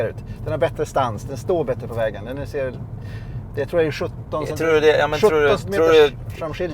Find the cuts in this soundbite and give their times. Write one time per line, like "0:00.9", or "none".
none